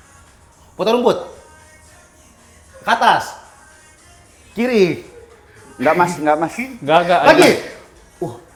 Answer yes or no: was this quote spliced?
no